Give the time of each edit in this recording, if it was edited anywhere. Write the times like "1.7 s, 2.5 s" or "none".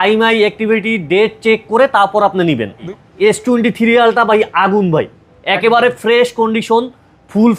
3.0 s